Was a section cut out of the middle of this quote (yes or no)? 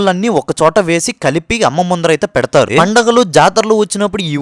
yes